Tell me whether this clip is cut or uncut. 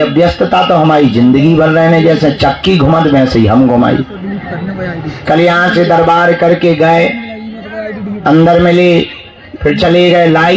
uncut